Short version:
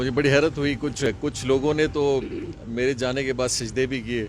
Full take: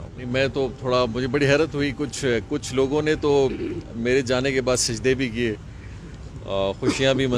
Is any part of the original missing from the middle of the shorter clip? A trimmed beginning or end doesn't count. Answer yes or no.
yes